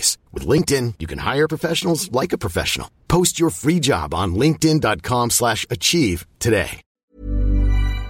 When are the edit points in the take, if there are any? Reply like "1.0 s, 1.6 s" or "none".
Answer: 6.9 s

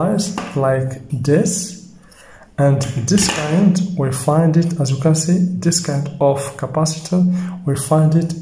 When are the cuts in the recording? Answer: none

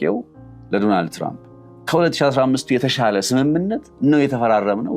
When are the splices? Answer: none

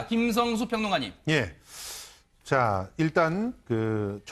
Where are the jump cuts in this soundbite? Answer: 2.9 s

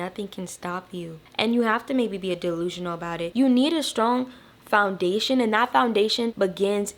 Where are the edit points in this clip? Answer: 3.3 s

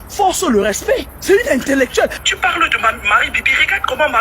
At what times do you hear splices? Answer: 1.1 s, 2.2 s

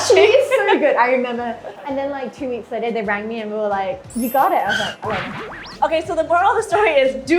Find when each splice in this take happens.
1.7 s, 4.0 s, 5.7 s

